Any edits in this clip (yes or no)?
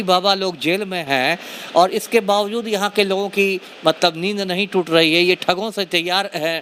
no